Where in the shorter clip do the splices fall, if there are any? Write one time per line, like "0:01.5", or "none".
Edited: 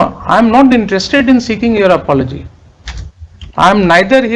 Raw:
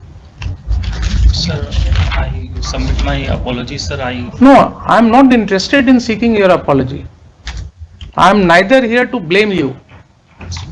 none